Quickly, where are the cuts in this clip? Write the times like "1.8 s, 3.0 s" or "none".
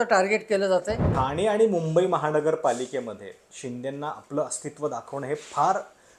1.1 s